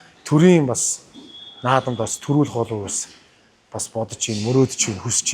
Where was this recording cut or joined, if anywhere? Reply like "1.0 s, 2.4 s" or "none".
none